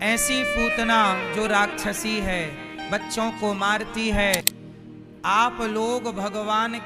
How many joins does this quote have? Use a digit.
1